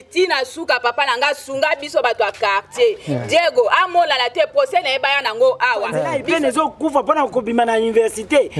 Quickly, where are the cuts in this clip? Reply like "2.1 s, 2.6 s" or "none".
6.0 s